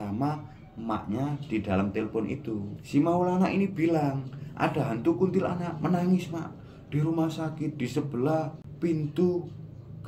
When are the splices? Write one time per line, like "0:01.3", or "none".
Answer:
0:08.6